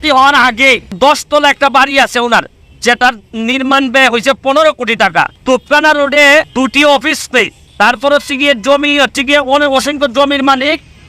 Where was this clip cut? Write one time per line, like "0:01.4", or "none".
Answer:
0:00.9
0:05.4
0:06.5
0:07.6